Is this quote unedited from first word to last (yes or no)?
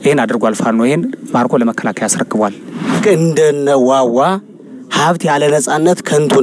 no